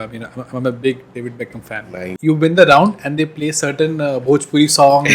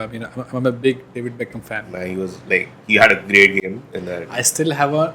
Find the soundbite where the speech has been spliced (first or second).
first